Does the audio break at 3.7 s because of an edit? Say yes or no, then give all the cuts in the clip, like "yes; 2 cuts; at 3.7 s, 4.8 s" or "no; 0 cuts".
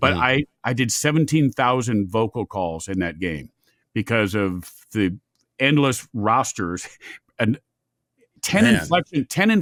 no; 0 cuts